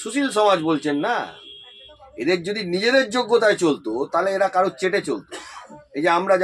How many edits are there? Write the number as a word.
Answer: zero